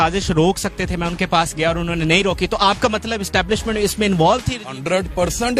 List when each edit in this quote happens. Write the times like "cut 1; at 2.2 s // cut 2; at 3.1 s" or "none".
none

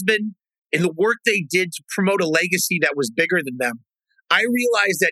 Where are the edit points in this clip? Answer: none

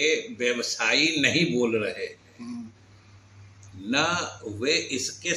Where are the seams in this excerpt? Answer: none

